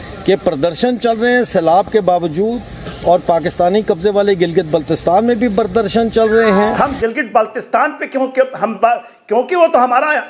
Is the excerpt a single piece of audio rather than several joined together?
no; 1 cut; at 6.7 s

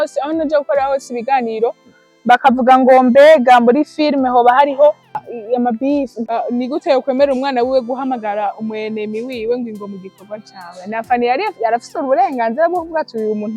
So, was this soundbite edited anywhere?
yes; 2 cuts; at 5.3 s, 6.2 s

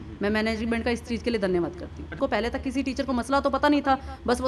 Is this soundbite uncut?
no; 1 cut; at 2.2 s

